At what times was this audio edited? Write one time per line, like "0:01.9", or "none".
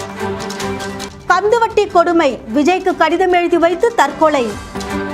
0:01.1